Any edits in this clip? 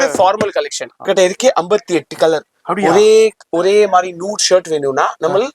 yes; 1 cut; at 1.0 s

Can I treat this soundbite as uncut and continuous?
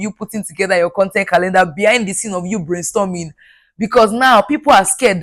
yes; 0 cuts

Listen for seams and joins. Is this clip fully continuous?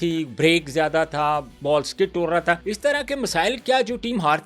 no; 1 cut; at 2.7 s

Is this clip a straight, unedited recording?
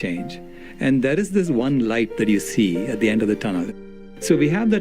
no; 1 cut; at 3.7 s

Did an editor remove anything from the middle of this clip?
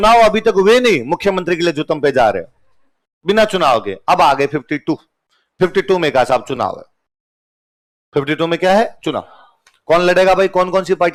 no; 0 cuts

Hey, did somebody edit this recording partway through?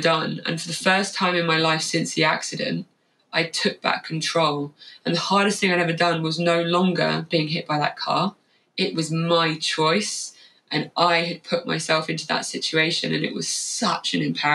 no; 0 cuts

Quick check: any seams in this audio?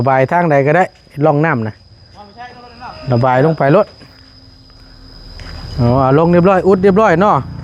no; 0 cuts

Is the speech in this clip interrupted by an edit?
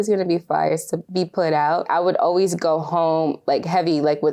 yes; 2 cuts; at 1.0 s, 1.9 s

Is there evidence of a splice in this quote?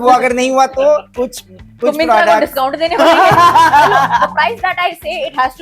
no; 0 cuts

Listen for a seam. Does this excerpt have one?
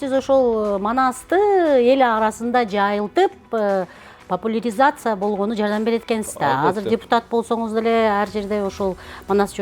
no; 0 cuts

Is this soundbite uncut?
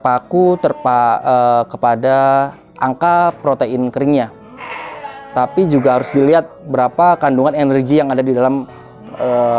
yes; 0 cuts

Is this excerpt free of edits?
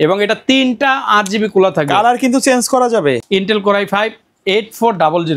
no; 1 cut; at 3.2 s

